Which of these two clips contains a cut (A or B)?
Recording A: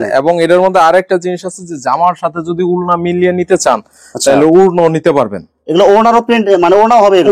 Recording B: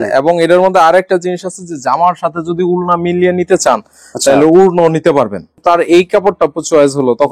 B